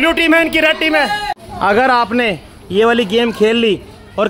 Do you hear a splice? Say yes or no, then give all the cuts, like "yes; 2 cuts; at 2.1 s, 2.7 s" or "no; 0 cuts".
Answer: yes; 1 cut; at 1.5 s